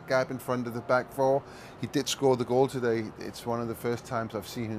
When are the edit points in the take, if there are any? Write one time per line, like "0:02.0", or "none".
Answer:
0:01.0